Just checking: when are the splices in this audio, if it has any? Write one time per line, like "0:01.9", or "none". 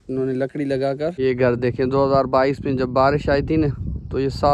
0:01.1